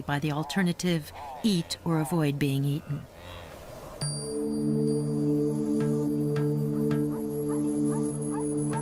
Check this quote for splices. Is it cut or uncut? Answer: uncut